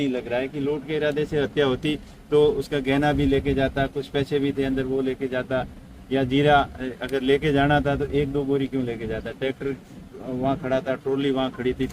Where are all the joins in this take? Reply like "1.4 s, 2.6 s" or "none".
none